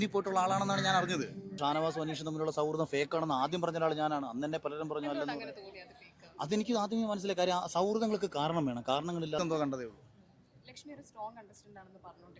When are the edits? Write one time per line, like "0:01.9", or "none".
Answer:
0:01.6
0:09.4